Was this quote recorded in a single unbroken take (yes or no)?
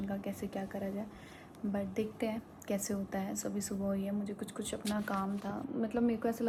yes